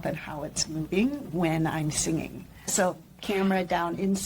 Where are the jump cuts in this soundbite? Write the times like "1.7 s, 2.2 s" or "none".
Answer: 2.7 s